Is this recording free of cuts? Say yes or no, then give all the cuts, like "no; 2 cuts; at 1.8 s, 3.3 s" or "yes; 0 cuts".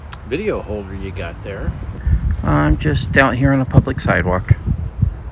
no; 1 cut; at 2.0 s